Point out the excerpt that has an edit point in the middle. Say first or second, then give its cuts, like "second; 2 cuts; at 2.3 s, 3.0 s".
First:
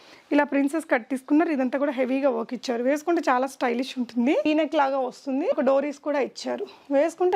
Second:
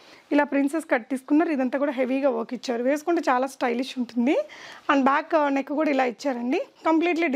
first; 1 cut; at 4.4 s